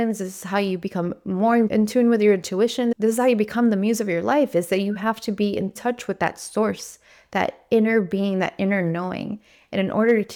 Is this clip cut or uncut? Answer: uncut